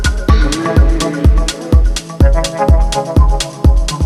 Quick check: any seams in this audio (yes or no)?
no